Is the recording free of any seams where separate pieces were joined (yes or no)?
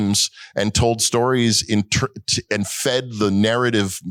yes